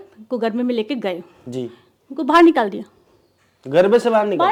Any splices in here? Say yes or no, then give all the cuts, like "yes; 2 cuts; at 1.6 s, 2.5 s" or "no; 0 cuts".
no; 0 cuts